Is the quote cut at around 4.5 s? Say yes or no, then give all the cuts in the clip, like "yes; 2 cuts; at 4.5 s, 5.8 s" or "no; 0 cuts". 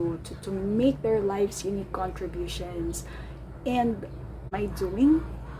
yes; 1 cut; at 4.5 s